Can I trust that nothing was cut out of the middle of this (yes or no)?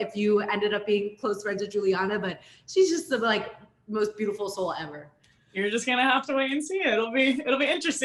yes